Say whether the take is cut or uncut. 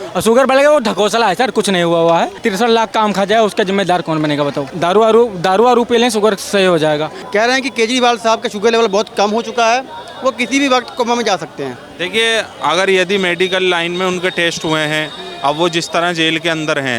cut